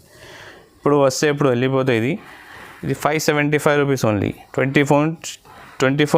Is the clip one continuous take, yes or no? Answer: yes